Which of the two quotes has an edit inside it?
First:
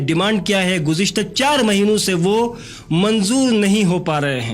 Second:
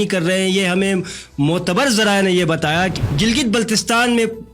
second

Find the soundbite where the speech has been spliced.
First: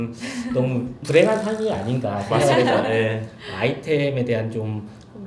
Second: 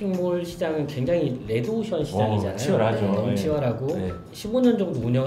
second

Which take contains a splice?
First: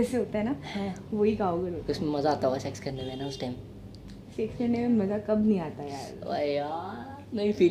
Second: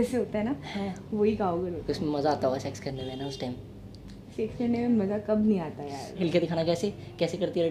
second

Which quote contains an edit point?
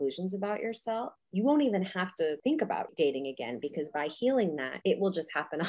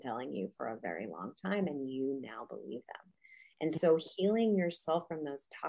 first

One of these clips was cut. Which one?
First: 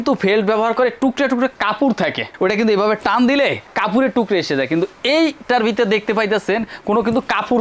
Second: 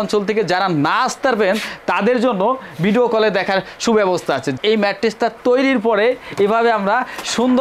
second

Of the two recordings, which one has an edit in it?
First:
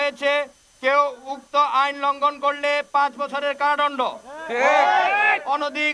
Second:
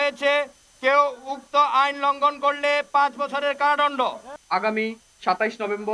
second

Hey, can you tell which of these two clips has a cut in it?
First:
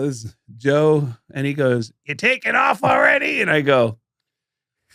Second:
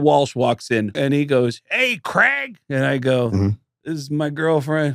second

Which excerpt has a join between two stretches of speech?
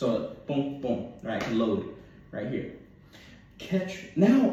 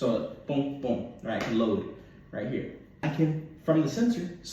second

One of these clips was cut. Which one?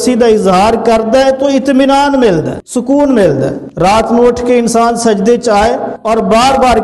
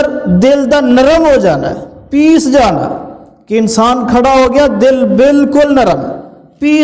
first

